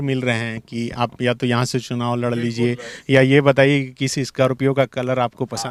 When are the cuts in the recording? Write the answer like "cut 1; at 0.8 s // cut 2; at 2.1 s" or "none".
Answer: none